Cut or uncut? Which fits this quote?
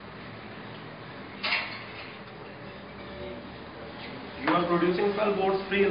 cut